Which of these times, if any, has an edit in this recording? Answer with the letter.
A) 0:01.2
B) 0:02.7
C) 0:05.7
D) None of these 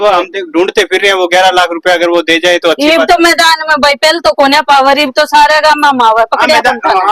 D